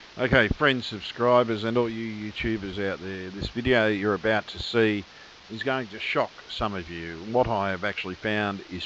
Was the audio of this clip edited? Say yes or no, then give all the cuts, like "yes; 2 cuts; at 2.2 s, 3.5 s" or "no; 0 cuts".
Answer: no; 0 cuts